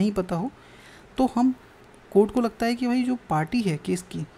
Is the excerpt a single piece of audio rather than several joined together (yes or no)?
yes